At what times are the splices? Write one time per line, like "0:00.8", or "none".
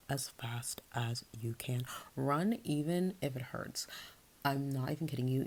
none